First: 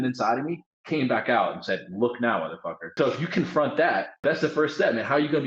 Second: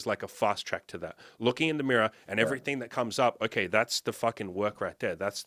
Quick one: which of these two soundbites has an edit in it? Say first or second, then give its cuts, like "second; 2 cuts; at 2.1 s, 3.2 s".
first; 2 cuts; at 2.9 s, 4.2 s